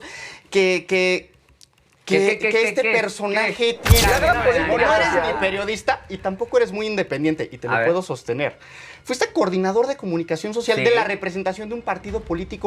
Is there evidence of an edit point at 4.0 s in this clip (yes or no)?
yes